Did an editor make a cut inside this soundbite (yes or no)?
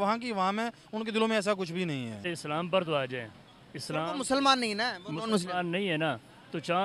yes